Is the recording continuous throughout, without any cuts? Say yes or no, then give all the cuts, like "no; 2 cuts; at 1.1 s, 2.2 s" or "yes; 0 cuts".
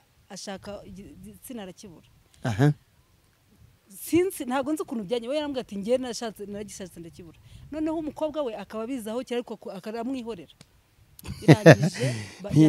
yes; 0 cuts